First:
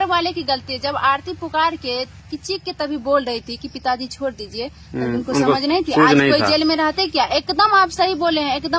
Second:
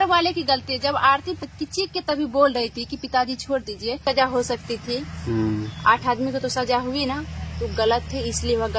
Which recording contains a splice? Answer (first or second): second